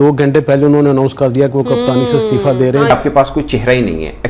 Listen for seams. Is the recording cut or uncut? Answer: cut